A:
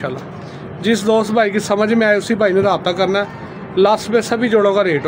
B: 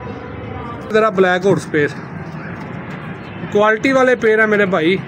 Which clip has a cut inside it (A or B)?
B